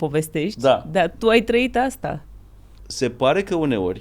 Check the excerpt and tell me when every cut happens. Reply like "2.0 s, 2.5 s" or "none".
2.8 s